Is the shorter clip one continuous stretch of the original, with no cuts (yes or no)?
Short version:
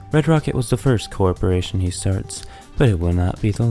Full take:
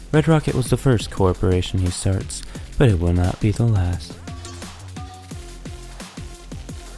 yes